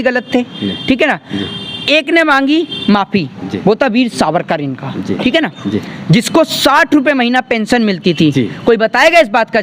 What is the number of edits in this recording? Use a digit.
0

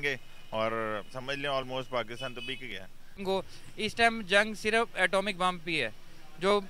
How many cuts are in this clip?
1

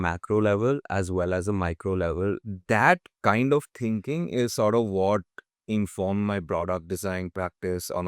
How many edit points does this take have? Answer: 1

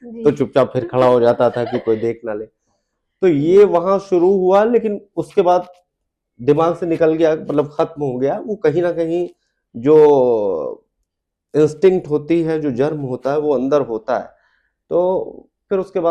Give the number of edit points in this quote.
0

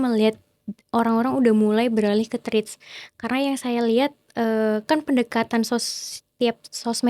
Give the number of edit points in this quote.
0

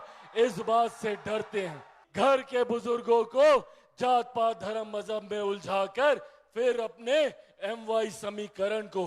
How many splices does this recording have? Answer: 1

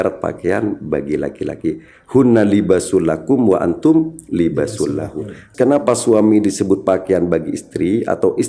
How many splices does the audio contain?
1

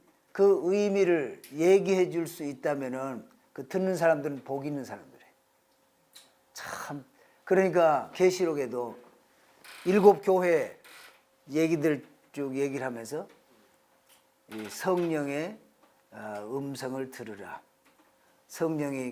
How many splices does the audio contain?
0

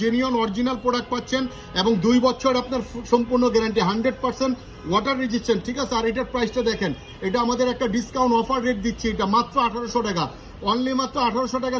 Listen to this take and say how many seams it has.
0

